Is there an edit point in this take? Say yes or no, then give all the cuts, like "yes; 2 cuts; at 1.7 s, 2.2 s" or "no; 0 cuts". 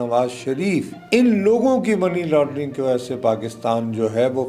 yes; 1 cut; at 0.9 s